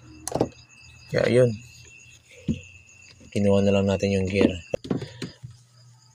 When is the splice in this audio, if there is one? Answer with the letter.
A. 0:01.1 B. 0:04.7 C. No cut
B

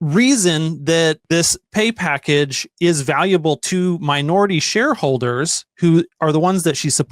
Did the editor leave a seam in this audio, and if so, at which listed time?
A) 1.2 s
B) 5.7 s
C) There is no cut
A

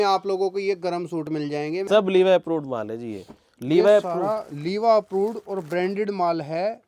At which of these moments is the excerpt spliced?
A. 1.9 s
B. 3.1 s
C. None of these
A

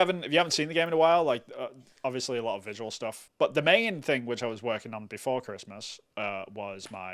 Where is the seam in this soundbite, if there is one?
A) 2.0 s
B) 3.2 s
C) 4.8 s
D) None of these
B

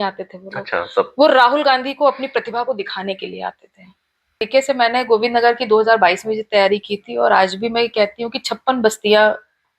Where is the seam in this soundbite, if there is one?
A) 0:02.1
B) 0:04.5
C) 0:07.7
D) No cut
B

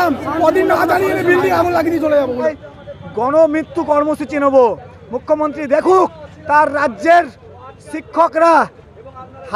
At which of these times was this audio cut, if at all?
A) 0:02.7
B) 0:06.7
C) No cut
A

